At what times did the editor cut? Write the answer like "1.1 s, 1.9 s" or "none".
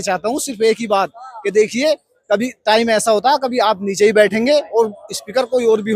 none